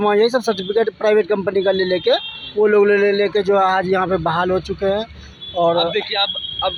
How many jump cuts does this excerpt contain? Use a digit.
0